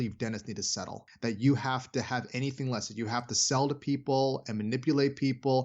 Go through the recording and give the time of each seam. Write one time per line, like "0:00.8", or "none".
0:01.0